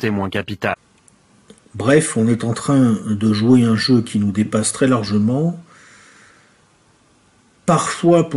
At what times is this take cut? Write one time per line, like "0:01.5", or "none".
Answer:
0:01.0